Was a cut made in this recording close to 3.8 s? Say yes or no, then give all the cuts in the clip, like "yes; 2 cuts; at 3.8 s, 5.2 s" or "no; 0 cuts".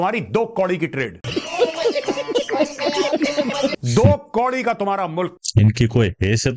no; 0 cuts